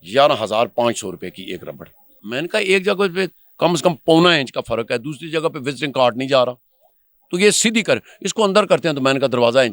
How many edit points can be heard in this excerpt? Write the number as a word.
one